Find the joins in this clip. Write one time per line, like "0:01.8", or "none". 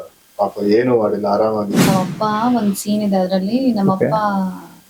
0:01.9